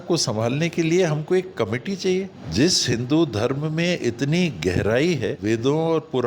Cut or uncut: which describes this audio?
cut